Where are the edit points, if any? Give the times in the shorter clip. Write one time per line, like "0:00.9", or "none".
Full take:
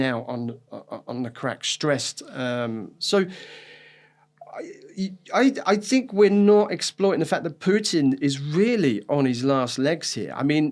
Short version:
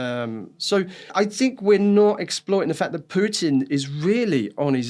0:01.1